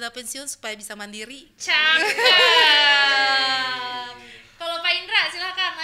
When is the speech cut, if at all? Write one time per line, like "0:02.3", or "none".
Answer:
none